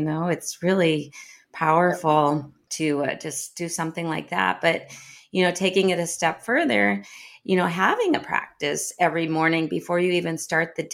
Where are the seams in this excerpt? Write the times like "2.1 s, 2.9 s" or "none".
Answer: 2.6 s